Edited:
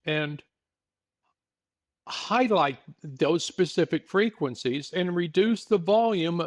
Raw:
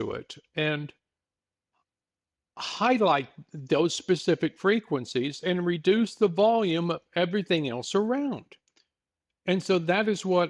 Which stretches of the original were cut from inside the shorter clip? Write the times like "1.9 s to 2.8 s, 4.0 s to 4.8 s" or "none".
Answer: none